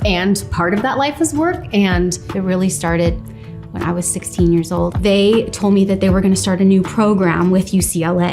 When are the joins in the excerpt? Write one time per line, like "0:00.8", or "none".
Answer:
0:02.3
0:05.0

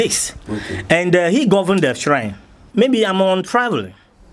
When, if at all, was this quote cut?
0:02.6

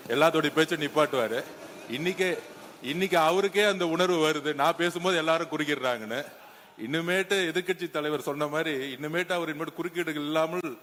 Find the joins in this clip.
none

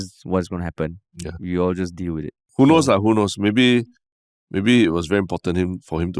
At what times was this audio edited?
0:02.4

